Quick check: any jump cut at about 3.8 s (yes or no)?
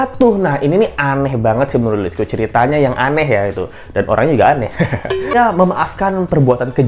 no